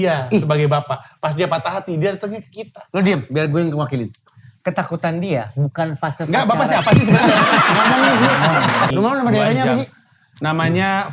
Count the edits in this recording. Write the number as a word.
one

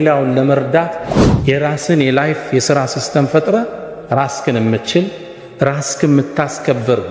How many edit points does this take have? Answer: one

